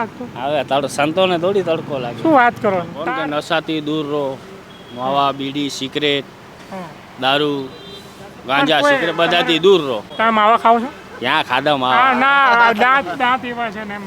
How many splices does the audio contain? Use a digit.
2